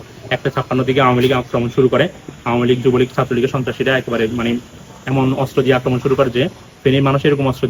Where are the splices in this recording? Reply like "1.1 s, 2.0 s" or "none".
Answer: none

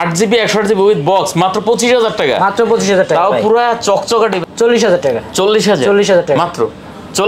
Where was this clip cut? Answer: 4.4 s

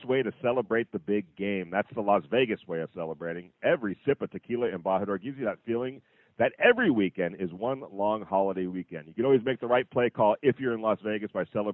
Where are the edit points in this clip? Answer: none

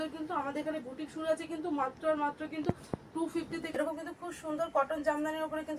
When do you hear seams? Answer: 3.7 s

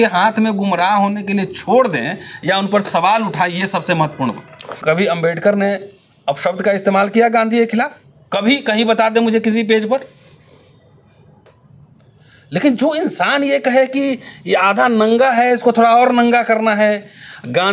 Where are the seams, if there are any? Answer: 4.8 s

